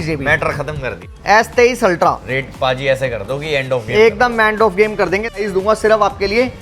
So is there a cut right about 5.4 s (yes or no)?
yes